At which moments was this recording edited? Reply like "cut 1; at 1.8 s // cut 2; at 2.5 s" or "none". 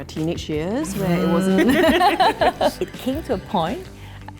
cut 1; at 2.8 s